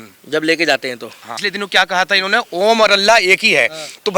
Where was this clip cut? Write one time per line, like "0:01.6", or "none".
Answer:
0:01.3